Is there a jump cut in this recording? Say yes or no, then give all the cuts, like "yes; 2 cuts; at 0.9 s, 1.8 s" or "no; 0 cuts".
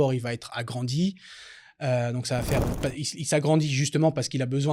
no; 0 cuts